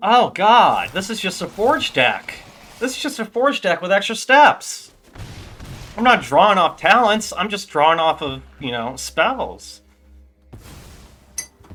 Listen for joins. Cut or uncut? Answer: uncut